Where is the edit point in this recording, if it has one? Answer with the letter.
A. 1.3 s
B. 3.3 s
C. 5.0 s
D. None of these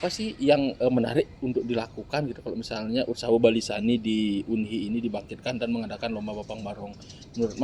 D